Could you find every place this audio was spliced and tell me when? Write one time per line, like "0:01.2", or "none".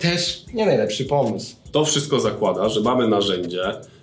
0:01.7